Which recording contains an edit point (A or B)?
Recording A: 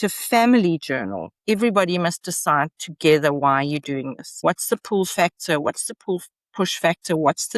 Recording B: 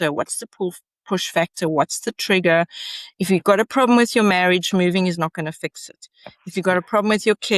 A